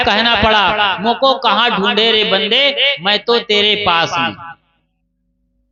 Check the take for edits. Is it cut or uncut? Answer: uncut